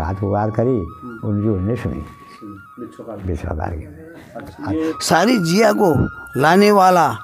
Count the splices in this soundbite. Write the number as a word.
one